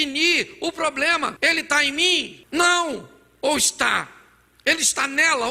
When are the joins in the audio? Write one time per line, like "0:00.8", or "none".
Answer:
0:01.3
0:02.4